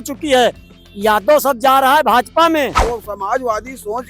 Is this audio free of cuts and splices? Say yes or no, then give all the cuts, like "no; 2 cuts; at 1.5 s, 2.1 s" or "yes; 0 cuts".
no; 1 cut; at 2.8 s